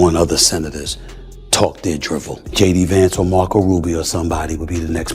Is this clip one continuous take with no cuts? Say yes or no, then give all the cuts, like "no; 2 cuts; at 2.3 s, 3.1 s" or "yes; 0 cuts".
no; 1 cut; at 2.4 s